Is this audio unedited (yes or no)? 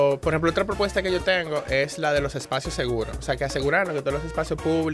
yes